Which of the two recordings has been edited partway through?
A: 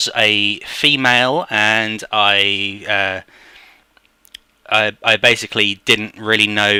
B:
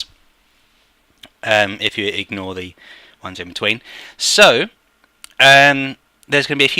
B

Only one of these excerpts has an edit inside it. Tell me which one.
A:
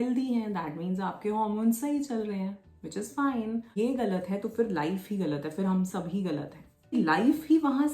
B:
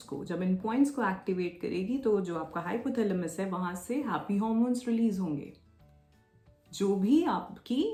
A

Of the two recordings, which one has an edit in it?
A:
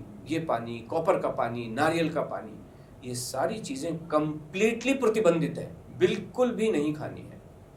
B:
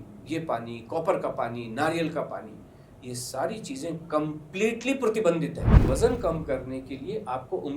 B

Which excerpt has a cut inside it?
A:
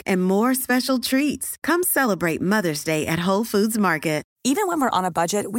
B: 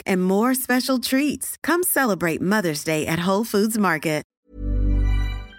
B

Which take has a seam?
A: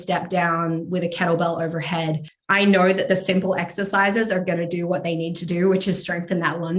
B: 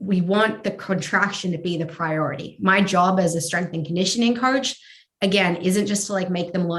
A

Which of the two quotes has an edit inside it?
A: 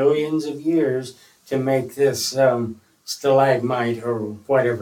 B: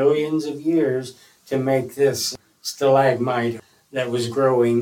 B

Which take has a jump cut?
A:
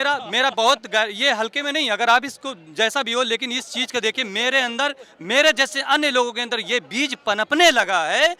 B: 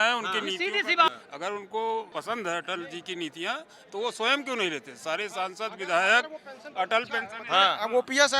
B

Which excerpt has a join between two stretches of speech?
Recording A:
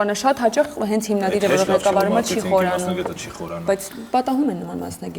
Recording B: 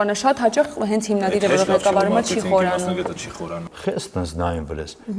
B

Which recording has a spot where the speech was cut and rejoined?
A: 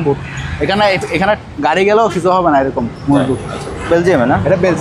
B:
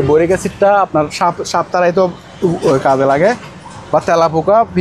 A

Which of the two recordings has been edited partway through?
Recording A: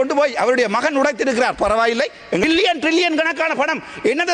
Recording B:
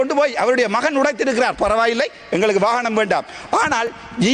A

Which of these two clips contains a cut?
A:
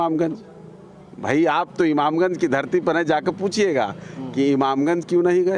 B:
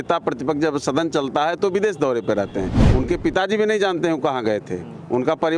B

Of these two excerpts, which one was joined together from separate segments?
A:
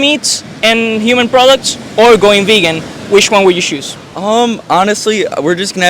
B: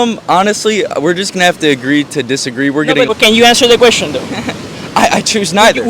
B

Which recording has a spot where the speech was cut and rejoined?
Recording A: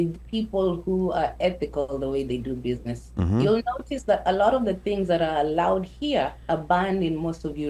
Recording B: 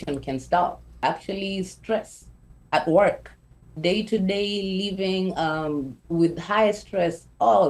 B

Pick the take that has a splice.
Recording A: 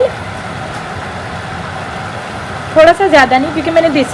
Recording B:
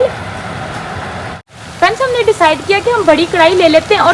B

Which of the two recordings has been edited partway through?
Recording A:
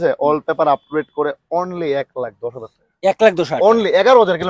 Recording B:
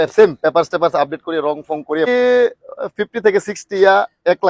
B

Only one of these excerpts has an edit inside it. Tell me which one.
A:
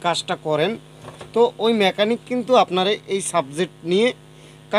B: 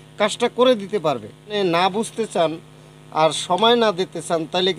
B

